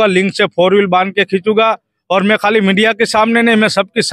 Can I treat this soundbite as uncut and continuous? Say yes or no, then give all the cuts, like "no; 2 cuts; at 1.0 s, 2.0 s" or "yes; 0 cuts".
yes; 0 cuts